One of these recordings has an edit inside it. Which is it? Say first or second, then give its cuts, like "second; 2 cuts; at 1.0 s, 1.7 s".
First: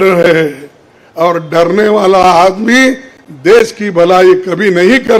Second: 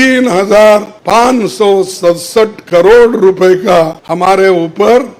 second; 2 cuts; at 0.9 s, 4.0 s